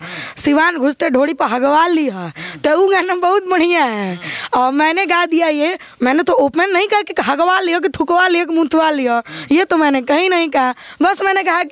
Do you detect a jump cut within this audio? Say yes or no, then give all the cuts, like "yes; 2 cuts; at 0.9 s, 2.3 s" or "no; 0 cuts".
no; 0 cuts